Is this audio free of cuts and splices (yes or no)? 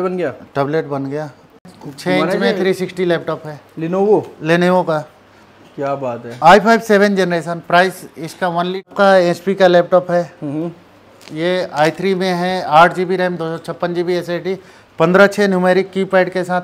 no